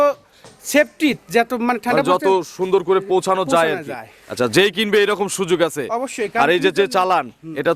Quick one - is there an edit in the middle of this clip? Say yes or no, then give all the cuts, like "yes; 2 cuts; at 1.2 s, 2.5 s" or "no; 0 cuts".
no; 0 cuts